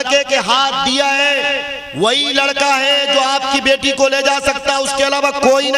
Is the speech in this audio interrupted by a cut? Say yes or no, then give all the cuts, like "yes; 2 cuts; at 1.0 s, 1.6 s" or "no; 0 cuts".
no; 0 cuts